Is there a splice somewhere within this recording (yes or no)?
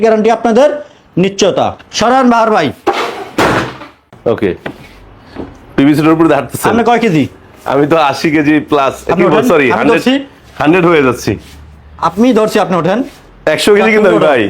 yes